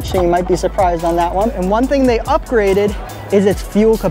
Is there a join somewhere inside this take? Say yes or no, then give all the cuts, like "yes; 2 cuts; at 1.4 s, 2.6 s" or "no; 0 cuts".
yes; 1 cut; at 1.5 s